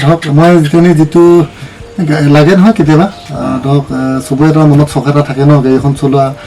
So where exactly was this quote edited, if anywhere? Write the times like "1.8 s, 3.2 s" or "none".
none